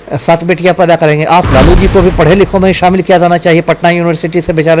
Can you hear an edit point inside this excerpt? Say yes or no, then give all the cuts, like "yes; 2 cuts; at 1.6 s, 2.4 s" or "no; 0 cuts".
yes; 1 cut; at 1.5 s